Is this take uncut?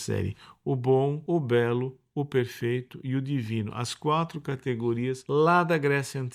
no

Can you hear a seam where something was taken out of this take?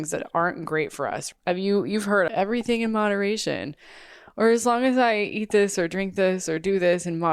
yes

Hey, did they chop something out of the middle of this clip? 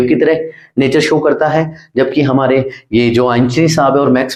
no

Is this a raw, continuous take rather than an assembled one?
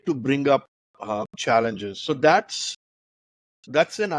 no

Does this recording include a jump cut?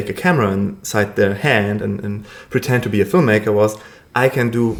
no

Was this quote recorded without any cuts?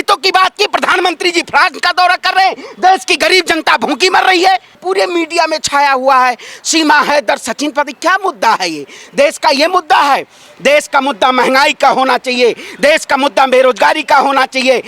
no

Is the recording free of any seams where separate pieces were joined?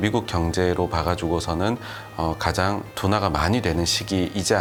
yes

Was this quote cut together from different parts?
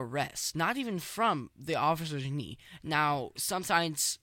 no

